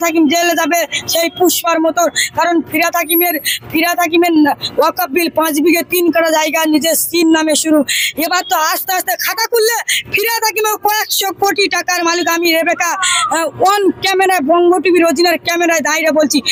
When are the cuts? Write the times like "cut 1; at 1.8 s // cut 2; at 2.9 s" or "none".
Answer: none

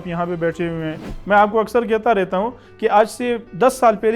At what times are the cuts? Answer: cut 1; at 1.1 s

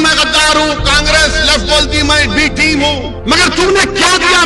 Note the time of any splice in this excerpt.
cut 1; at 3.1 s

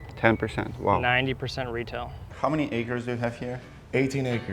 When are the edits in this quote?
cut 1; at 2.2 s

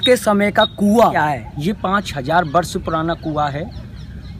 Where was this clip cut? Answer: cut 1; at 1.2 s

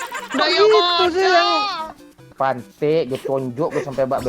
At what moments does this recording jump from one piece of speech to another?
cut 1; at 2.3 s

